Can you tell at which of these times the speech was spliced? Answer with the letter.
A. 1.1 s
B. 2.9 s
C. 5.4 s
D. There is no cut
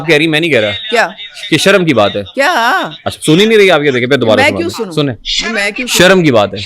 D